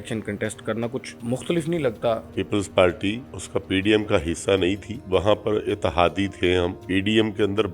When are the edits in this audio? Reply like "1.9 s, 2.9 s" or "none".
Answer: 1.1 s, 2.4 s, 3.3 s, 4.9 s, 6.8 s